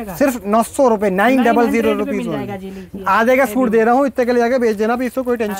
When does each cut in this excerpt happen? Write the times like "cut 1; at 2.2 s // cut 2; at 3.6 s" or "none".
none